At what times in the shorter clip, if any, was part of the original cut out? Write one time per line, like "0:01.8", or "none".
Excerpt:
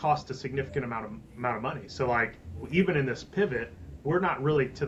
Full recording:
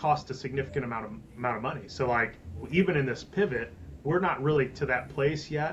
none